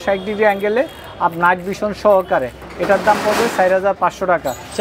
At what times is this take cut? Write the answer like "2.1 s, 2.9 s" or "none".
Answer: none